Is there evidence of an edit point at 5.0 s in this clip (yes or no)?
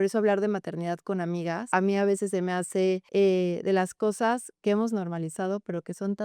no